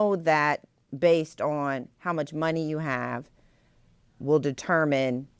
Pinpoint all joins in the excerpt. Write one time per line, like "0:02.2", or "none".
none